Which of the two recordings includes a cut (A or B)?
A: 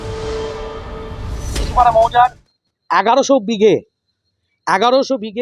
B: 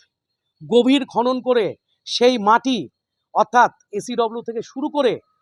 A